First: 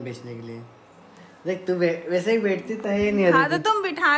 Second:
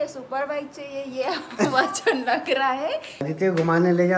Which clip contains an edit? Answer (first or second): second